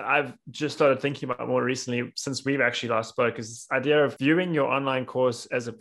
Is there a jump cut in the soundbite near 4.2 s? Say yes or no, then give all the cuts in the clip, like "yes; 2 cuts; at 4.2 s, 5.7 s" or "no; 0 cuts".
yes; 1 cut; at 4.2 s